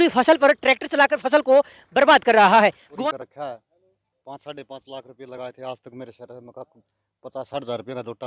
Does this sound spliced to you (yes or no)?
yes